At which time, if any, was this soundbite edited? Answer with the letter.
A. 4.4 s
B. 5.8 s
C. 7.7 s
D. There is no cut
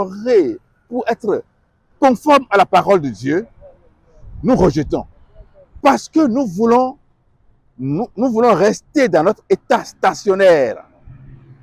B